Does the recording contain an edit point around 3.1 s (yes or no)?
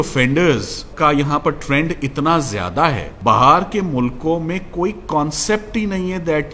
yes